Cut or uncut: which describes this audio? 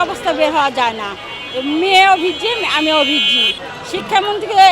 uncut